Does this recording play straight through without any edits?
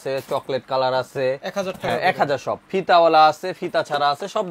yes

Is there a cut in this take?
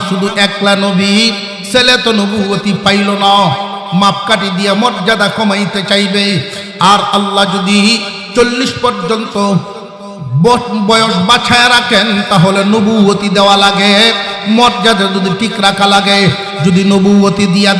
no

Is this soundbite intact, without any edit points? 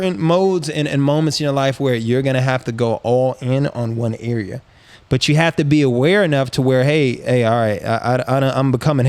yes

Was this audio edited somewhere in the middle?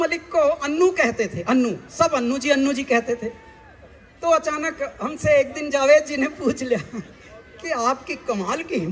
no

